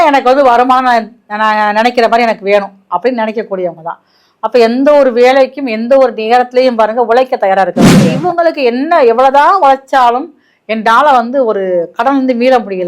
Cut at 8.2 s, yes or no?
yes